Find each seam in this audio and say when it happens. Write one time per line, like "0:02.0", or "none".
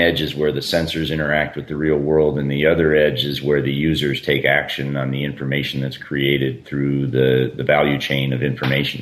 none